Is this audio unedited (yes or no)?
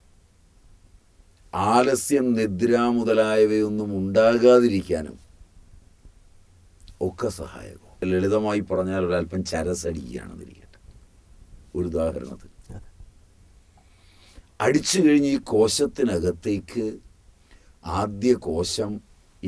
no